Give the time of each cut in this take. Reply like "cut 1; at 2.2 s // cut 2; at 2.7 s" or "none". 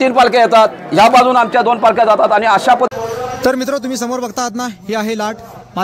cut 1; at 2.9 s

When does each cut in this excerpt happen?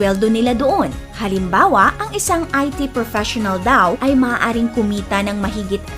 none

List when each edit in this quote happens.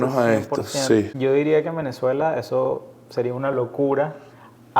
cut 1; at 1.1 s

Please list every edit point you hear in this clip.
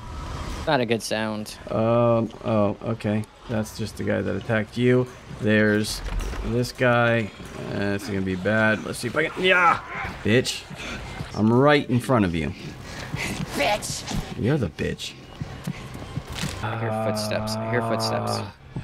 cut 1; at 11.2 s // cut 2; at 16.6 s

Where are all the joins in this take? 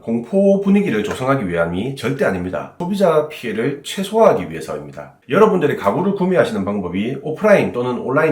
cut 1; at 2.8 s

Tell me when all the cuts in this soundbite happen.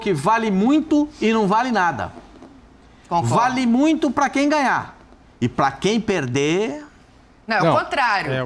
none

